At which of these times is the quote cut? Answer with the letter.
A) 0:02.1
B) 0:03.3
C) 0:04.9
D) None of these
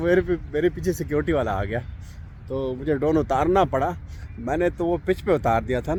D